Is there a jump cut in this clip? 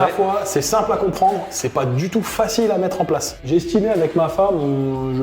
yes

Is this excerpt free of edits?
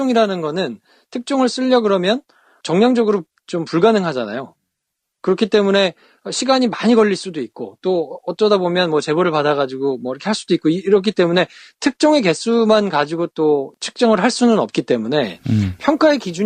yes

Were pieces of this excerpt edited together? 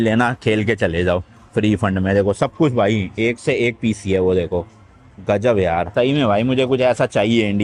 no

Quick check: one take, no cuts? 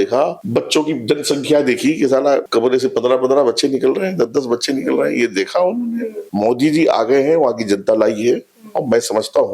no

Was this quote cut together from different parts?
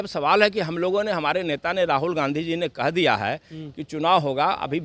no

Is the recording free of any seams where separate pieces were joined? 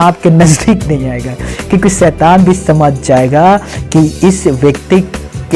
yes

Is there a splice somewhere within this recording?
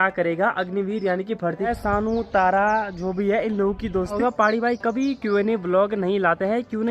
yes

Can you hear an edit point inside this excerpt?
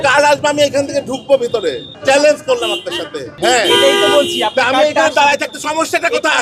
yes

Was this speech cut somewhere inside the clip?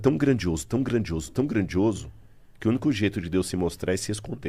no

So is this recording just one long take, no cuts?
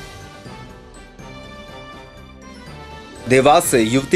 no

